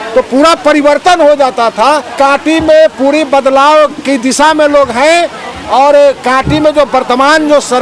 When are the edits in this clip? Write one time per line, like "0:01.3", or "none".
0:02.1

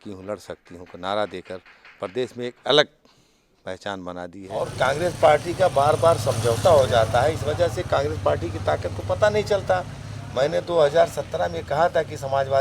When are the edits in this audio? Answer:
0:04.6

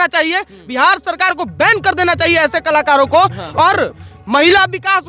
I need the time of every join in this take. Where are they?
none

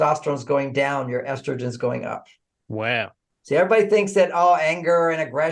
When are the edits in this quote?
0:03.3

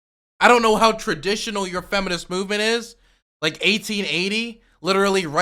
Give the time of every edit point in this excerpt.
none

